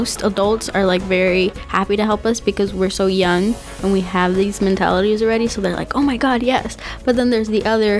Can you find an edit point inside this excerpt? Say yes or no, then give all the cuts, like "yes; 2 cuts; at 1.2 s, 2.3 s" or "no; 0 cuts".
no; 0 cuts